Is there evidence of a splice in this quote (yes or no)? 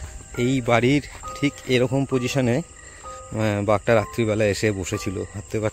no